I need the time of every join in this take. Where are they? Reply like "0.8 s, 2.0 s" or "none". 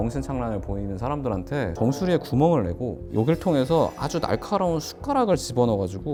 none

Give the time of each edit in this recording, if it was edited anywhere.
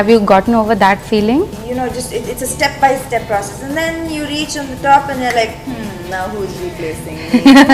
1.6 s

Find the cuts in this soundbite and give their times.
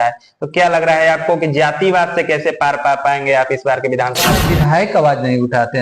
4.4 s

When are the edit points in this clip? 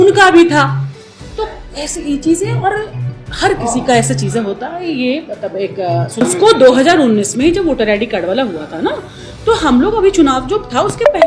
6.2 s

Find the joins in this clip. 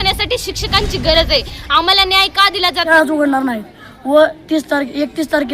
2.9 s

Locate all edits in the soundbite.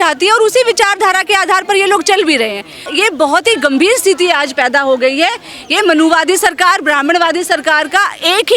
2.9 s

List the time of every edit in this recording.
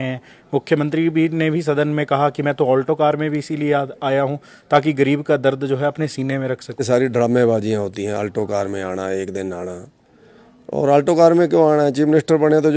6.8 s

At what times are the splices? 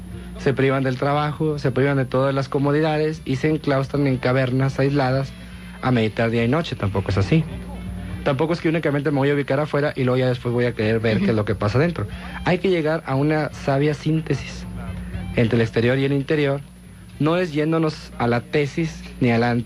11.4 s

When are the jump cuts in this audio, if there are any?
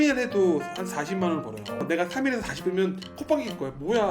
1.8 s

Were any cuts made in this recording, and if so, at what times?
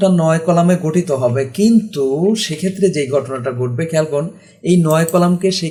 none

